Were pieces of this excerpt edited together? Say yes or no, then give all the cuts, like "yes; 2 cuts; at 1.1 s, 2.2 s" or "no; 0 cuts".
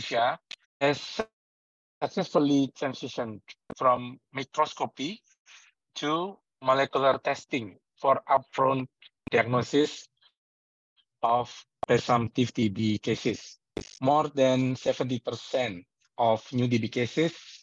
no; 0 cuts